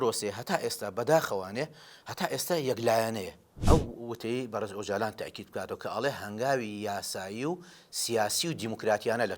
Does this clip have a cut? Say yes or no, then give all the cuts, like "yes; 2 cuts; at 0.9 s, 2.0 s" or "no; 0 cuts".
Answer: yes; 1 cut; at 3.5 s